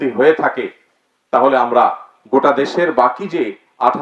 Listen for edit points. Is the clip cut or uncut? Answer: uncut